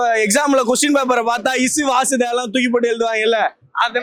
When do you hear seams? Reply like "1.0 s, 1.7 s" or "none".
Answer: none